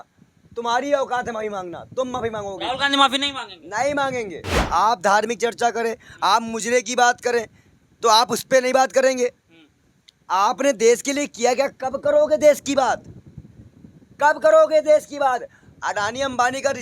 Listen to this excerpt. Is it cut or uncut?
cut